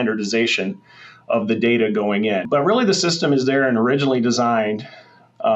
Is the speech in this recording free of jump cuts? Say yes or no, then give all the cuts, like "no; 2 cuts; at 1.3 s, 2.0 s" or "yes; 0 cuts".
no; 1 cut; at 2.5 s